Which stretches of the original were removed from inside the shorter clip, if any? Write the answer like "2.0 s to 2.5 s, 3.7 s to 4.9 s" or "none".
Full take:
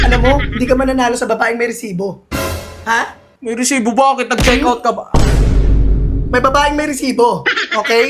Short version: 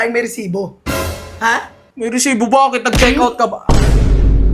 none